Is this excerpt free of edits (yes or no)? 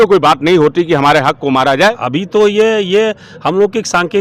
no